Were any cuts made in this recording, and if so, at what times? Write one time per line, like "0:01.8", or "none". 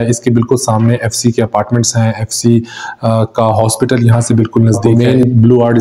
0:04.9